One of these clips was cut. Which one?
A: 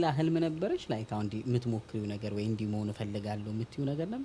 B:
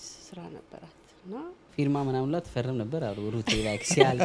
B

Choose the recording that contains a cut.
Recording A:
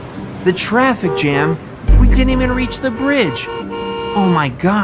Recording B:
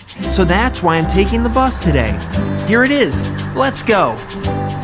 B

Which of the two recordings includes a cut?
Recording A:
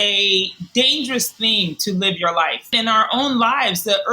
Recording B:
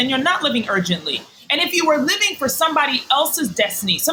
A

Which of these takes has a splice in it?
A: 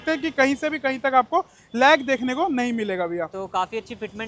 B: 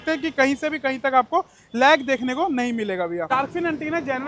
B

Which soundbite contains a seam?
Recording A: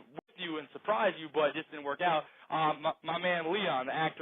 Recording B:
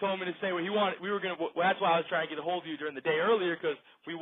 A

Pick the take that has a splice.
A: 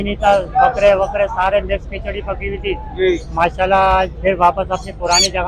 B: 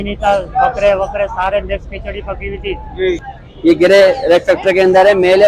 B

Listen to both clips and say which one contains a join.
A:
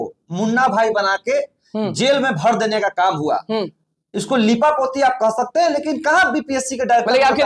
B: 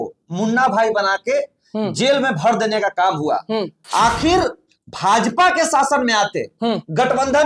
B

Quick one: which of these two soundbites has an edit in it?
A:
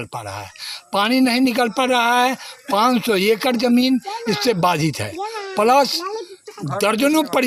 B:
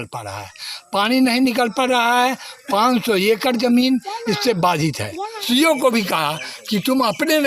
B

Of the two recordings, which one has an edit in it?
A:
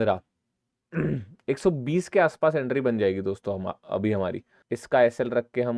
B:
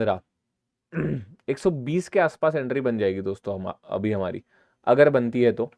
A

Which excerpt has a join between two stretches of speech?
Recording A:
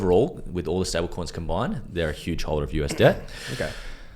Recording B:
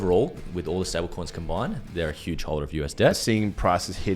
B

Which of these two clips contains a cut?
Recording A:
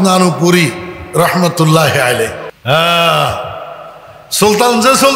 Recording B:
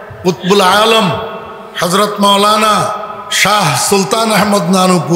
A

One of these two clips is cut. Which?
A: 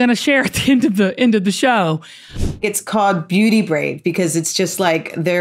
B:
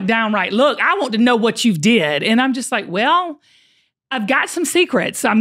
A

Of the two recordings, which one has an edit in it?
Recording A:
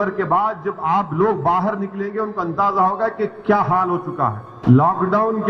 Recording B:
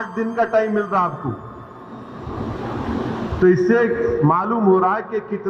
A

